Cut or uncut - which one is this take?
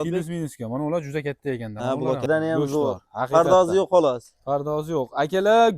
cut